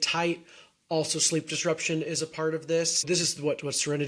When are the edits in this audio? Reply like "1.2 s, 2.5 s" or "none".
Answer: 3.1 s